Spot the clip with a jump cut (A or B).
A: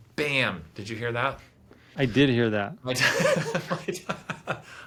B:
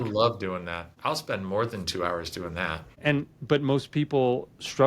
B